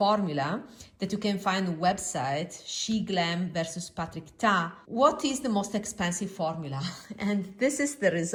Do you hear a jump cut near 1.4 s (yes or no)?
no